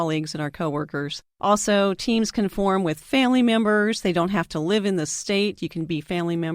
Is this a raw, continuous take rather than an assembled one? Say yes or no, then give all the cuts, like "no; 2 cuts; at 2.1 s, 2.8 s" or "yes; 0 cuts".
no; 1 cut; at 1.2 s